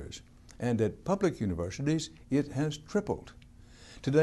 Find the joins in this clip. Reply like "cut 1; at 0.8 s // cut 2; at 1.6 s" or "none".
cut 1; at 1.3 s